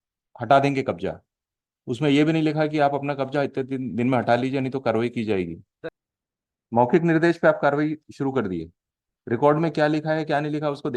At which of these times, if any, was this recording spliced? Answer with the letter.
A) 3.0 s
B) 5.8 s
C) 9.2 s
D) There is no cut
B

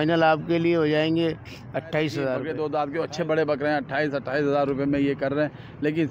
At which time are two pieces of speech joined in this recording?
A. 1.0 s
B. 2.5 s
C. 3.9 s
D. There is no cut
B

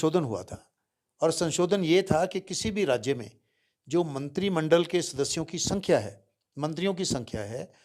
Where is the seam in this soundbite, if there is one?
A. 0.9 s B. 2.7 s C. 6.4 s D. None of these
D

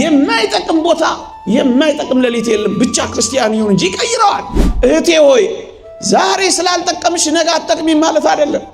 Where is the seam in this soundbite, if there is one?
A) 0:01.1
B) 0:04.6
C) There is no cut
B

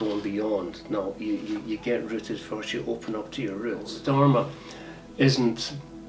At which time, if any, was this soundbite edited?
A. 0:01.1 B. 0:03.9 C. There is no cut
B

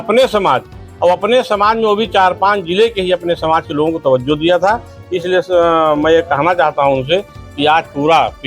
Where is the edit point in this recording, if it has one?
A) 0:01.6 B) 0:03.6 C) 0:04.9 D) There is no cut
D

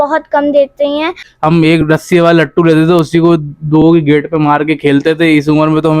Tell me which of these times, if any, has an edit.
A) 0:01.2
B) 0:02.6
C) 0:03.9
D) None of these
A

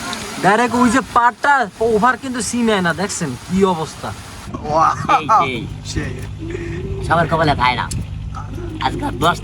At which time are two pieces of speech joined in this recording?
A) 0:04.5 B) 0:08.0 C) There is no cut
A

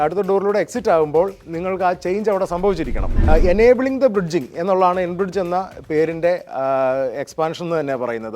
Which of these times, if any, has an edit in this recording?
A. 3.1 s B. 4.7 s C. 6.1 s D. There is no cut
A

